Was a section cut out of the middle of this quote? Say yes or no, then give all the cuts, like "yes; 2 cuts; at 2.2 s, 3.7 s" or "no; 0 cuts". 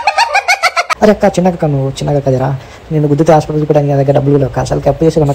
yes; 1 cut; at 0.9 s